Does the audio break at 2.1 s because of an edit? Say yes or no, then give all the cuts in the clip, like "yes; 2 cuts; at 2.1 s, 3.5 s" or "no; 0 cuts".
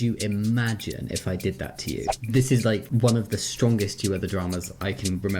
yes; 1 cut; at 2.1 s